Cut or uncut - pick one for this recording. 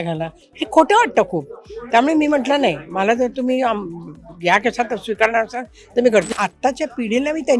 cut